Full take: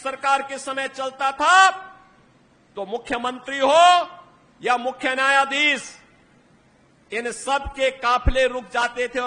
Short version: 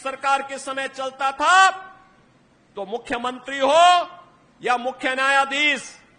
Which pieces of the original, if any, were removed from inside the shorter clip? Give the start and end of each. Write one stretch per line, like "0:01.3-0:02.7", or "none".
none